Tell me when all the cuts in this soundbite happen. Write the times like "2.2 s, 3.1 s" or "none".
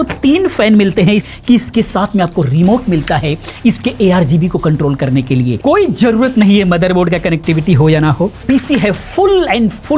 1.3 s, 5.6 s, 8.4 s